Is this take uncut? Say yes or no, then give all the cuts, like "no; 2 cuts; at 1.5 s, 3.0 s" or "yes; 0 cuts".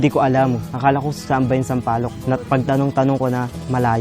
no; 1 cut; at 2.1 s